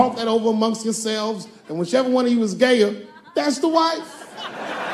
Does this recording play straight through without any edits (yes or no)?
yes